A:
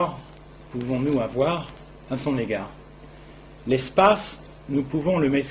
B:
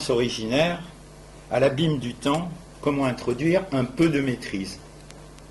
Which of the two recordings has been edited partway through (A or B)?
A